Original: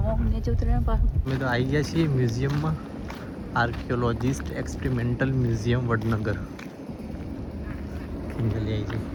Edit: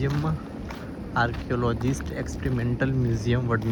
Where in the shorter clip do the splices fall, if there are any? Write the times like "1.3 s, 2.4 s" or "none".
none